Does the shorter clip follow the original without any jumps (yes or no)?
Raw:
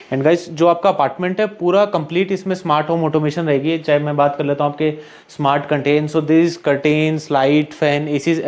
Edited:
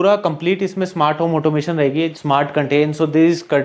no